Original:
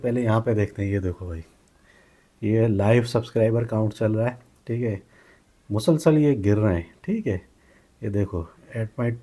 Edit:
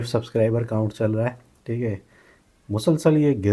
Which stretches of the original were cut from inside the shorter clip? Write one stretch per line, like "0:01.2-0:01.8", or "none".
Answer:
none